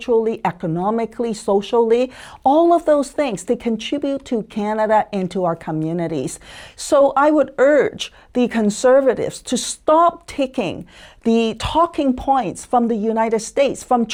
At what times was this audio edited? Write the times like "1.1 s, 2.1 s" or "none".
none